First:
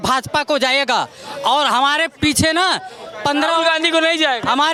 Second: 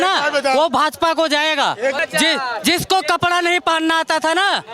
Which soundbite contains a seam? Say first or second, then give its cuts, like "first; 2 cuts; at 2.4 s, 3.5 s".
second; 1 cut; at 2.0 s